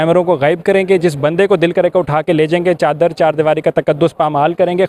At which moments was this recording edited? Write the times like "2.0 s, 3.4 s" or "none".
none